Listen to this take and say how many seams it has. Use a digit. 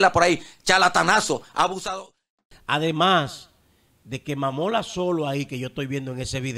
1